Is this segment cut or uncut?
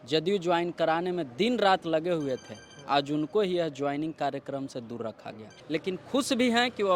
cut